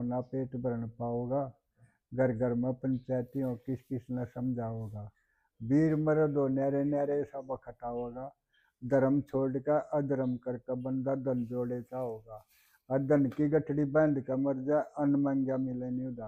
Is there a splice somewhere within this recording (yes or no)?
no